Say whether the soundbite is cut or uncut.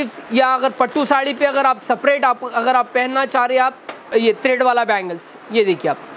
uncut